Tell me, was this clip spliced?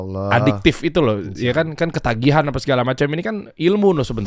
no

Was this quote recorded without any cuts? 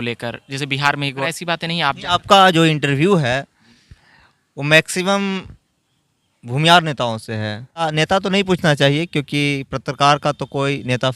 no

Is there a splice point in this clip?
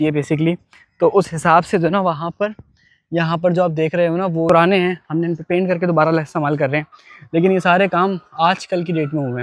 yes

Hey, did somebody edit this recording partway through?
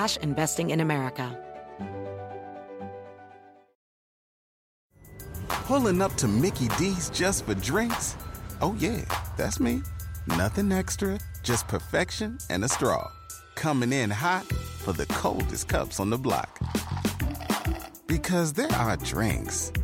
yes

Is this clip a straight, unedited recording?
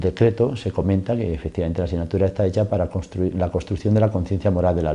no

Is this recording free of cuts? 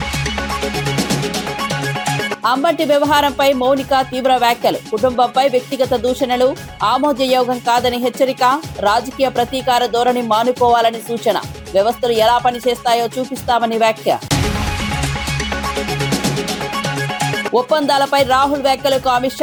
yes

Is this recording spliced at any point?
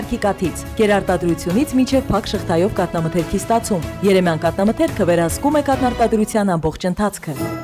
no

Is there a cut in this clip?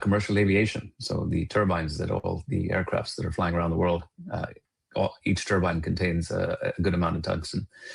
no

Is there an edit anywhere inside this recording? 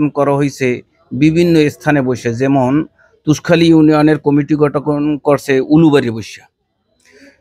no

